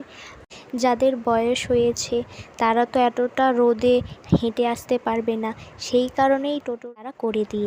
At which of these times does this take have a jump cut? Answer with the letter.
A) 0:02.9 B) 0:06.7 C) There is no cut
B